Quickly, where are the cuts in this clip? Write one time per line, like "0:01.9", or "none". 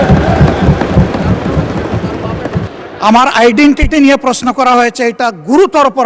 0:02.7